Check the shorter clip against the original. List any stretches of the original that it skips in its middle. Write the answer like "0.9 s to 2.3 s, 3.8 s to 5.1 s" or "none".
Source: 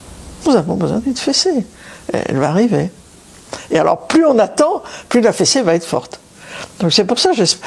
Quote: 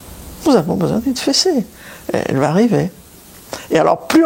none